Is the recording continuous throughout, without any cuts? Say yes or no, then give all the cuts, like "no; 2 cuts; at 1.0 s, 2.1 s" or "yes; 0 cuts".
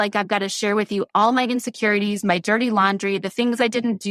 yes; 0 cuts